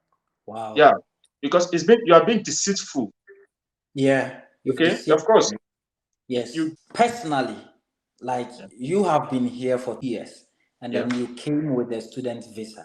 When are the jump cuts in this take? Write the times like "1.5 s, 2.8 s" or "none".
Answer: 6.7 s, 10.0 s